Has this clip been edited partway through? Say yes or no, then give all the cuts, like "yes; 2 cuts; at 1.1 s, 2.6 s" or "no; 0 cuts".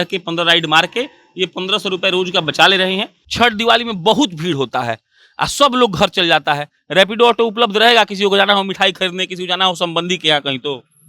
yes; 1 cut; at 3.2 s